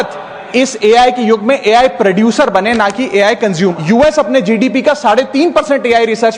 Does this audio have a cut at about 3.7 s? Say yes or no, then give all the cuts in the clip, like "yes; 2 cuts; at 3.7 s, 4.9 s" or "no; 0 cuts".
yes; 1 cut; at 3.7 s